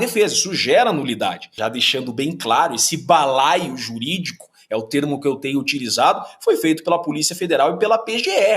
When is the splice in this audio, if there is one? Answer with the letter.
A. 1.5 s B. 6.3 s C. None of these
A